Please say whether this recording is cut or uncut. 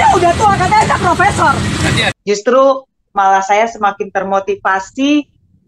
cut